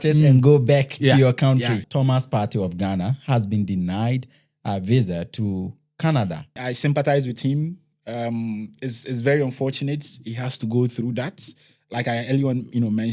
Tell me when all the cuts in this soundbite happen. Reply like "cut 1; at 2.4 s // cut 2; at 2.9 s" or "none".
cut 1; at 1.8 s // cut 2; at 6.7 s